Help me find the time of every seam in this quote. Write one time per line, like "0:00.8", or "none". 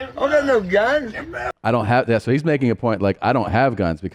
none

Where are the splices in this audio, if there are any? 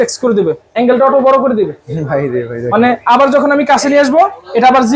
none

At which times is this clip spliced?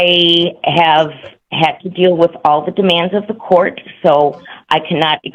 none

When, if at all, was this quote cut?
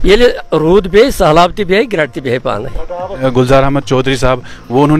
0:03.2

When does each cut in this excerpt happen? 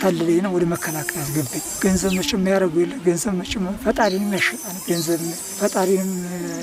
0:01.8
0:05.4

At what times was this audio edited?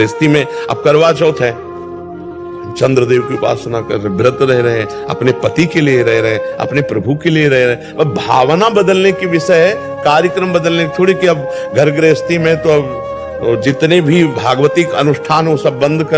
none

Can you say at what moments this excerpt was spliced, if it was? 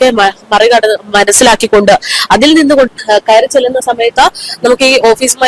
0:02.9

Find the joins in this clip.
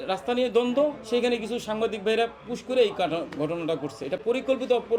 none

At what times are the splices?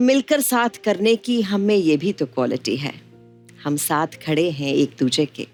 none

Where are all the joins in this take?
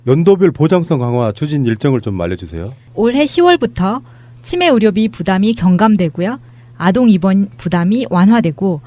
none

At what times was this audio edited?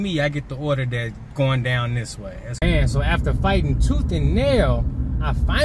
none

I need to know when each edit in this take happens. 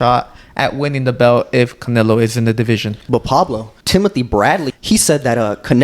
0:02.9
0:03.7
0:04.7

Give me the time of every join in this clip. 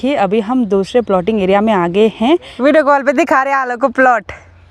0:02.5

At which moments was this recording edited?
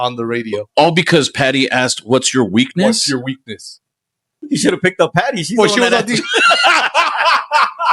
0:04.3

